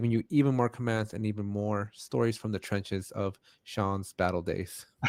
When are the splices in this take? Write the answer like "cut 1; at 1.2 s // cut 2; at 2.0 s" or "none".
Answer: none